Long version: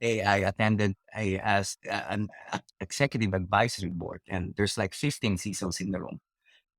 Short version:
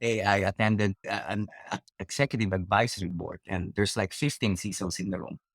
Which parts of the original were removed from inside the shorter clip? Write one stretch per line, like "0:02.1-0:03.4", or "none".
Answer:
0:01.0-0:01.8

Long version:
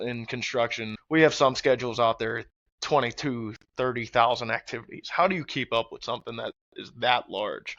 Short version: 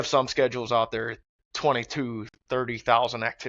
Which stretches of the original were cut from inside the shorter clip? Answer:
none

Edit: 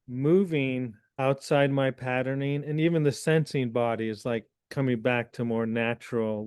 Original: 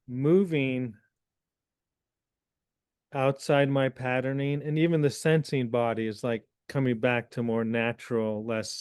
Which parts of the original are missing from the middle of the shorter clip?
0:01.0-0:03.0

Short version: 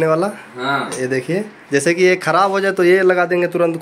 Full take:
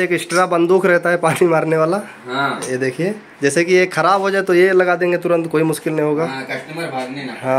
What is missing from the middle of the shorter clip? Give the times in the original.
none

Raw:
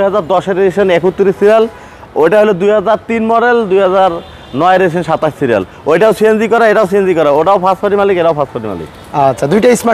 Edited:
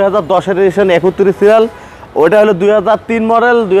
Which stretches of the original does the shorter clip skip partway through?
none

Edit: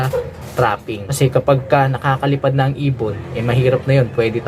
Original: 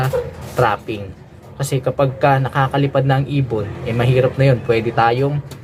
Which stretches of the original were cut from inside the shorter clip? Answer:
0:01.0-0:01.5

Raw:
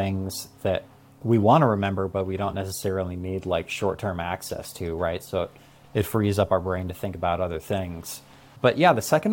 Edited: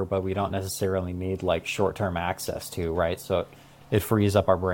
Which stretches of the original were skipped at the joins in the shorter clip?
none

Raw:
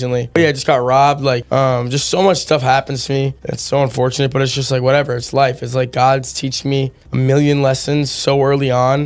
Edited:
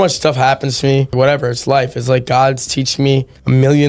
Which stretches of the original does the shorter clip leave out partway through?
0:03.4-0:04.8

